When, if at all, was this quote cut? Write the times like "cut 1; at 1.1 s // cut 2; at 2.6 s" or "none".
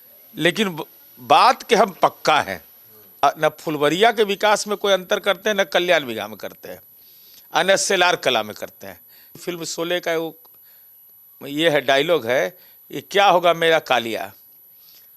cut 1; at 3.2 s // cut 2; at 9.3 s